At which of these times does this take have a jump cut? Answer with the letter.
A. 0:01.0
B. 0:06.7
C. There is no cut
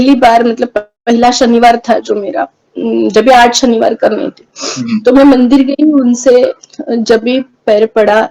B